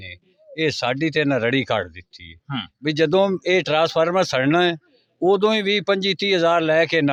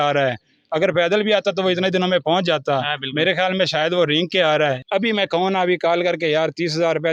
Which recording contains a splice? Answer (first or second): second